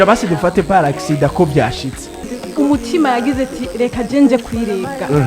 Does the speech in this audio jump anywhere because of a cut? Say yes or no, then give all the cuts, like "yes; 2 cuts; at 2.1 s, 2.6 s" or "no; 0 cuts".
yes; 1 cut; at 2.4 s